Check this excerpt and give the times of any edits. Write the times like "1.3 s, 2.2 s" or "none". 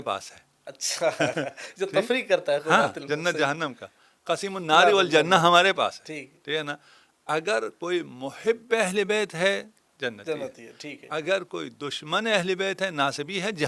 none